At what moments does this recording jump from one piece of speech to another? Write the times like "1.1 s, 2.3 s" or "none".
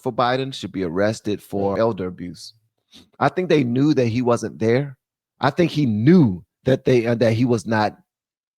1.8 s